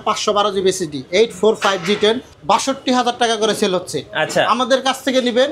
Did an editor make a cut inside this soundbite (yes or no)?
yes